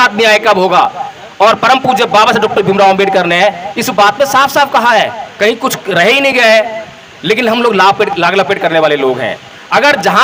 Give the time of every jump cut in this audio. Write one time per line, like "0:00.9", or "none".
none